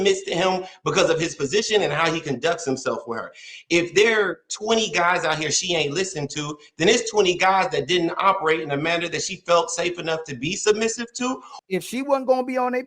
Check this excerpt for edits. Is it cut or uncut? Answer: cut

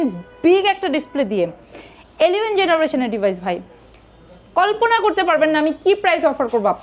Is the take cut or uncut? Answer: uncut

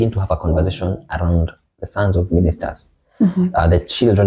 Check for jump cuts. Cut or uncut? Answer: uncut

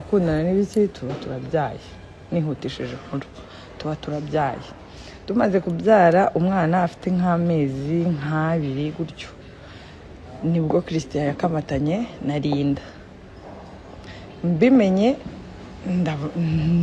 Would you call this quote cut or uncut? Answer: uncut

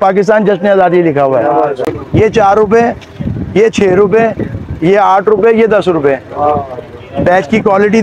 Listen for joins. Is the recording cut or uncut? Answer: cut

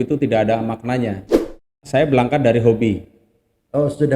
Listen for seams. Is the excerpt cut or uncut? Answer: cut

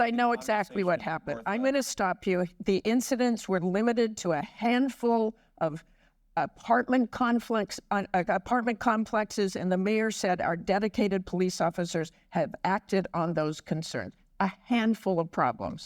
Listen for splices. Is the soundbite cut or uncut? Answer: cut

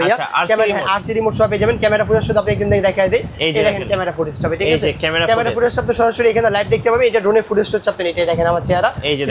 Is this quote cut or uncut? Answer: uncut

